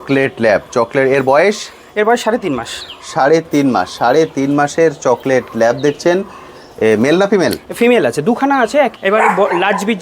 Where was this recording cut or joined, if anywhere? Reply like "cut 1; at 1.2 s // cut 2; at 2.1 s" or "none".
cut 1; at 8.9 s